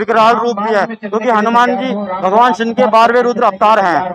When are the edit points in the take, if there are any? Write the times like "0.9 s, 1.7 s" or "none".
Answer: none